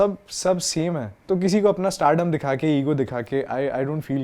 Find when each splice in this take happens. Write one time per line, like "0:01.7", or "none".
0:01.1